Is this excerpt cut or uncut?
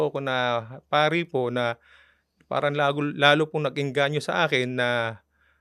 uncut